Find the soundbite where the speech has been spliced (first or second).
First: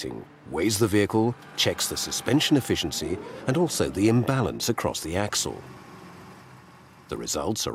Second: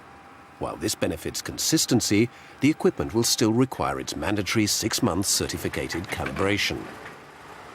second